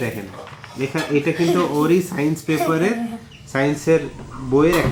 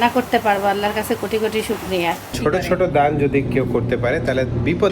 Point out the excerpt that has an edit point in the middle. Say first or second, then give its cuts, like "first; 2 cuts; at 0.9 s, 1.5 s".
second; 1 cut; at 2.3 s